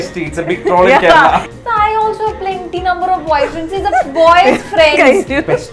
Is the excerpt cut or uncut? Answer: cut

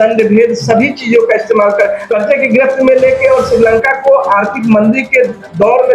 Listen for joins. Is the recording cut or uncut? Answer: cut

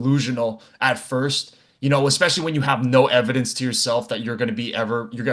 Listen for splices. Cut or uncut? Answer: uncut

